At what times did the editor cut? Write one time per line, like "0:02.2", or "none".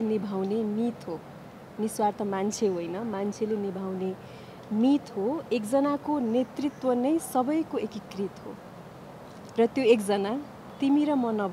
none